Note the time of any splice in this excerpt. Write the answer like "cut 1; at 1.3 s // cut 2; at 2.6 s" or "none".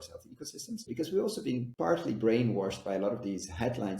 cut 1; at 0.9 s // cut 2; at 1.7 s